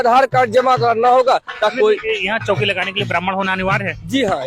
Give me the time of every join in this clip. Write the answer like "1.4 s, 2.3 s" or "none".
1.7 s